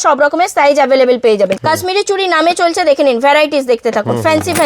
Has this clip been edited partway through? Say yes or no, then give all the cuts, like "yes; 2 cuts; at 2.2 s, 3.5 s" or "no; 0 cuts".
yes; 1 cut; at 1.6 s